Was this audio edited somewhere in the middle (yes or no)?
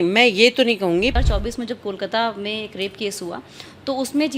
yes